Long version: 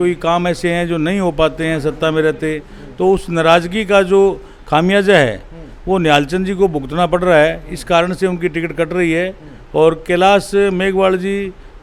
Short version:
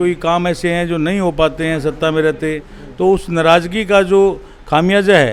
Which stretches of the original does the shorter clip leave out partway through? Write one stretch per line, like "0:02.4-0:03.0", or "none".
none

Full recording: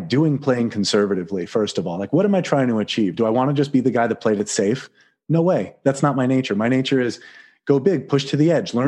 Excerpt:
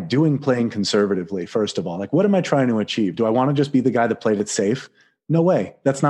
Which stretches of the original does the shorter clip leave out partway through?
none

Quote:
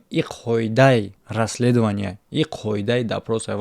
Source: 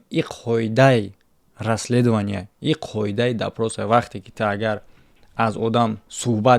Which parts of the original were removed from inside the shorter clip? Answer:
0:01.2-0:01.5

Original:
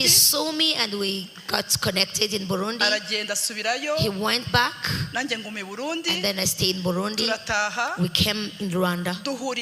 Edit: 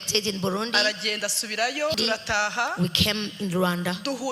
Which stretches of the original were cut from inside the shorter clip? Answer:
0:04.0-0:07.1

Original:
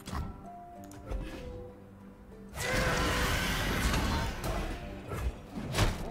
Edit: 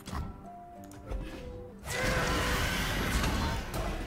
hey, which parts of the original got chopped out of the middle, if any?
0:01.7-0:02.4

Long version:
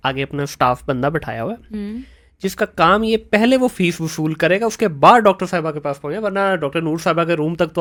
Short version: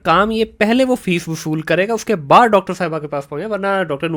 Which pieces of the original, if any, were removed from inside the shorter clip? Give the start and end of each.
none

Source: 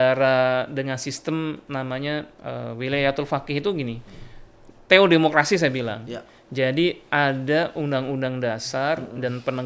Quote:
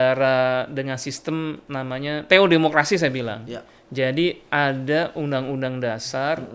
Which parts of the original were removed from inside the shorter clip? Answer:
0:02.2-0:04.8

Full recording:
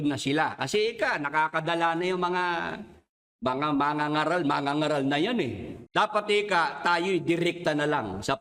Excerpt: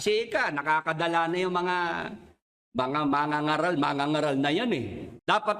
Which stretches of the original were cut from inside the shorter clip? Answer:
none

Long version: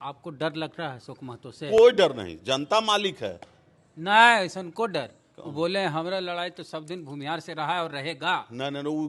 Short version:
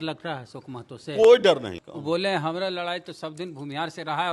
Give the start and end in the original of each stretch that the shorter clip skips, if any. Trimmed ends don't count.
0:02.3-0:05.3

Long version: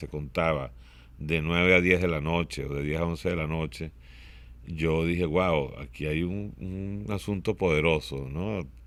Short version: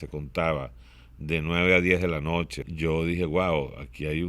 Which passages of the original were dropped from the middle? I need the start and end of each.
0:02.6-0:04.6

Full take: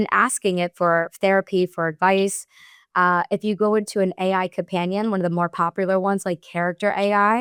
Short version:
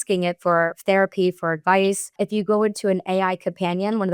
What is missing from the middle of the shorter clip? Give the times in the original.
0:02.5-0:03.3

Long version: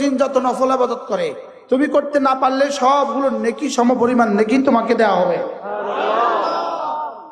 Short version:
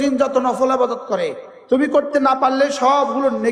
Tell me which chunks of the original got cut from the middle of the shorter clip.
none

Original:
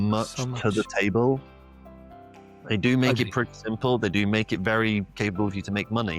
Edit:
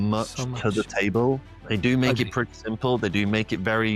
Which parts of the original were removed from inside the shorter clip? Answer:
0:01.5-0:02.5

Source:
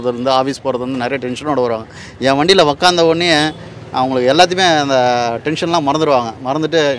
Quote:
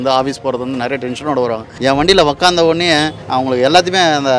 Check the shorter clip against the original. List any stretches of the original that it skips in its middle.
0:01.9-0:02.1
0:03.6-0:03.8

